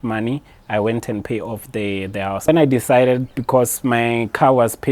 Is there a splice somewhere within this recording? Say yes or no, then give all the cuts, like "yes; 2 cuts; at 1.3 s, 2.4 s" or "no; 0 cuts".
yes; 1 cut; at 2.5 s